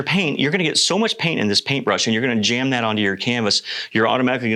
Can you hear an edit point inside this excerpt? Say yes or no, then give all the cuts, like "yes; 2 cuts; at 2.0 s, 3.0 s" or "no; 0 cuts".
no; 0 cuts